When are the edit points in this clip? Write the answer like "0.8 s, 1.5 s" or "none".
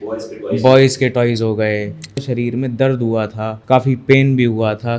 2.2 s, 3.5 s